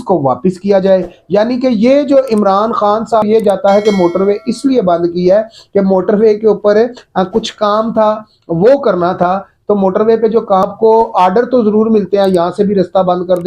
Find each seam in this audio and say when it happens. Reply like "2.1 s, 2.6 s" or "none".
3.2 s, 10.6 s